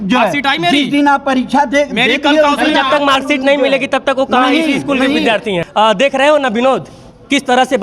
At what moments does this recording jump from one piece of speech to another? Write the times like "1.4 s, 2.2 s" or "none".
5.6 s